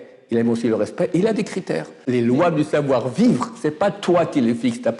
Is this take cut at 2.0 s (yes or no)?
yes